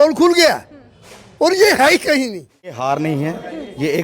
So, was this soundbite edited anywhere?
yes; 1 cut; at 2.8 s

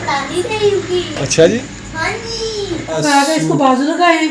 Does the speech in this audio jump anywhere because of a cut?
yes; 2 cuts; at 1.6 s, 3.0 s

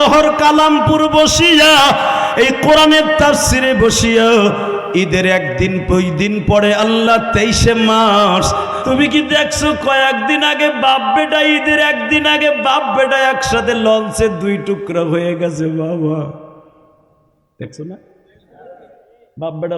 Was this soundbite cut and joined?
yes; 1 cut; at 8.8 s

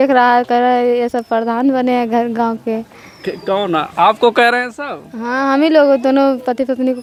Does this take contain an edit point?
no; 0 cuts

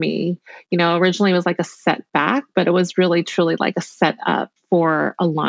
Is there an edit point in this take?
no; 0 cuts

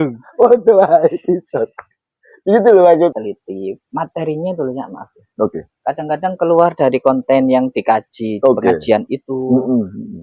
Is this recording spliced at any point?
yes; 1 cut; at 3.2 s

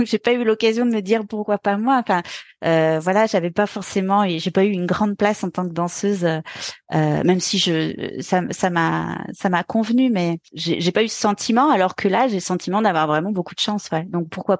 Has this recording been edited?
yes; 1 cut; at 10.5 s

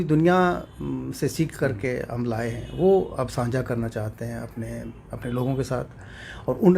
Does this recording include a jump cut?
no; 0 cuts

